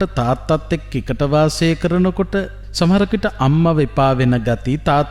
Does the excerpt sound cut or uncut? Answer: cut